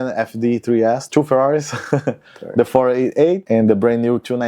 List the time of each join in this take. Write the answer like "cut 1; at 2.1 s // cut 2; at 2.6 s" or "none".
cut 1; at 1.0 s // cut 2; at 3.4 s